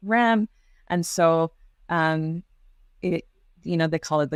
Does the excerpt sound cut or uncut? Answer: uncut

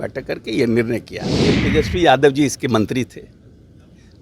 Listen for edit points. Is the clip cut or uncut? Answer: cut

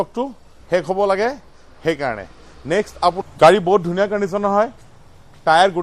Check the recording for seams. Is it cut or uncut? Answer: cut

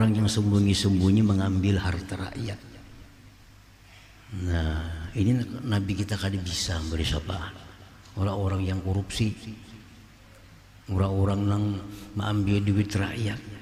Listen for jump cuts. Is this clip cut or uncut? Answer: uncut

